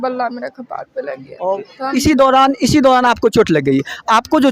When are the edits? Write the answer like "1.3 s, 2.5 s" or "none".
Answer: 1.7 s